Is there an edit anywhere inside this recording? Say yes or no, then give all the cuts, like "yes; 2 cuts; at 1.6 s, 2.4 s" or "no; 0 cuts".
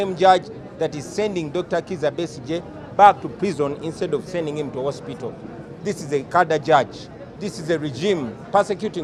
no; 0 cuts